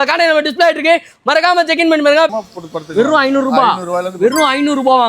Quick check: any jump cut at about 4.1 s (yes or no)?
no